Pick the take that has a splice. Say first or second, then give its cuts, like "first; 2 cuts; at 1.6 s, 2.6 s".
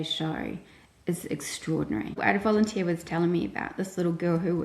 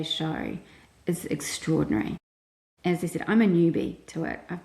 first; 1 cut; at 2.2 s